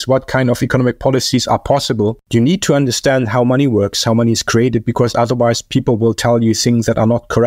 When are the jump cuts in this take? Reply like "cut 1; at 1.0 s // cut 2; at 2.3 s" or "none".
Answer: cut 1; at 2.2 s